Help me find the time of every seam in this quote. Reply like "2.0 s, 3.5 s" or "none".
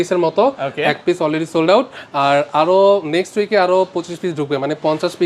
none

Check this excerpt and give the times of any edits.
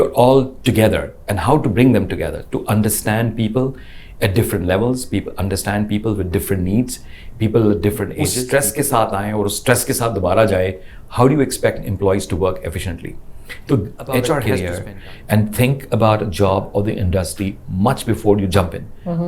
8.2 s, 14.5 s

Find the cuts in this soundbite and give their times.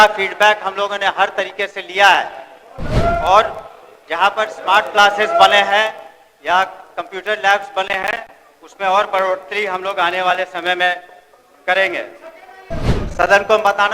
12.8 s

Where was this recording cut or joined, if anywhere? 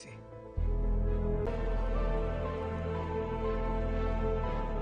1.5 s

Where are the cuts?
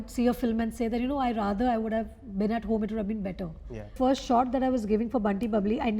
3.9 s

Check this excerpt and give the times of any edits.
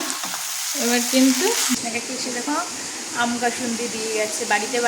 1.8 s

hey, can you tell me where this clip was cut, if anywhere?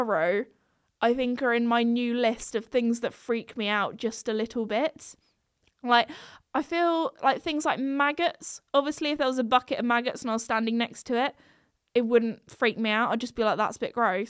none

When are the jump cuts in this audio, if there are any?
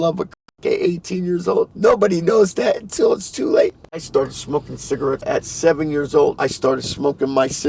1.7 s, 4.0 s, 5.2 s, 6.4 s

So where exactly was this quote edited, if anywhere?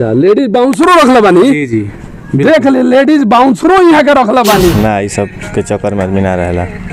4.7 s

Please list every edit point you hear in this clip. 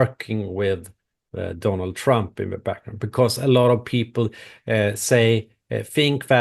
none

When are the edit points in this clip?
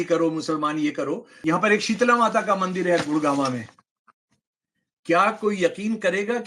1.3 s

